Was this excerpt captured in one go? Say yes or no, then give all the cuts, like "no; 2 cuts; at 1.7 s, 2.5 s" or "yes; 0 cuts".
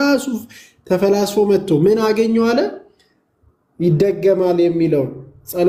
yes; 0 cuts